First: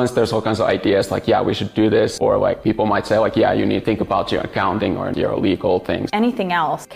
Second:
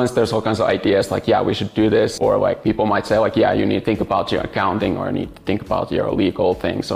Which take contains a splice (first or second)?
first